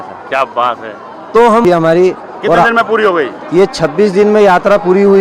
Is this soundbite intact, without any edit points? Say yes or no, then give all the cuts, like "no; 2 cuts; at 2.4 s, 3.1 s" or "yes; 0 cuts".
no; 1 cut; at 1.6 s